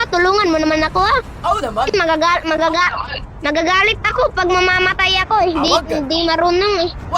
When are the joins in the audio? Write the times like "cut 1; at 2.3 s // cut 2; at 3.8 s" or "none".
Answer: none